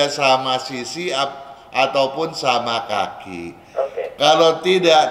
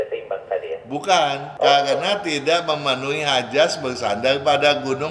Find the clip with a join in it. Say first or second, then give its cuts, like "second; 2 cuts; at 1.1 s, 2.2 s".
second; 1 cut; at 1.4 s